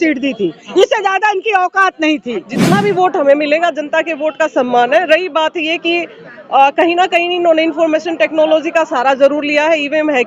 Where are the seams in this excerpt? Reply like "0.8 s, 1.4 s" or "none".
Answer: 2.5 s

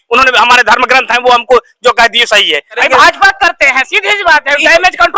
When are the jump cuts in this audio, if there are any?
2.8 s

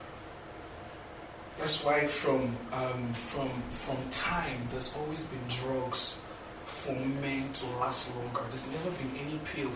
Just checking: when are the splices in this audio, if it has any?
none

